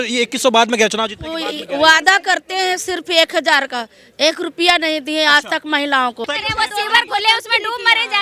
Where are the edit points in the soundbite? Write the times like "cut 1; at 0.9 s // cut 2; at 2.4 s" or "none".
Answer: cut 1; at 6.3 s